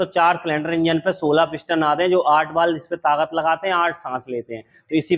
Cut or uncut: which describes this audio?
uncut